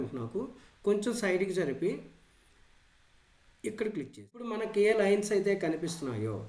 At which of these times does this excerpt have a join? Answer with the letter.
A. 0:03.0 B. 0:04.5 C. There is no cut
B